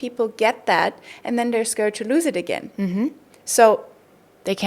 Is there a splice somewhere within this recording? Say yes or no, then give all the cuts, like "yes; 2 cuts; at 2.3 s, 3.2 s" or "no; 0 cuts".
no; 0 cuts